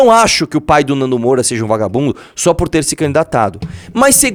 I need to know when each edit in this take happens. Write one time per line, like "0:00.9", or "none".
none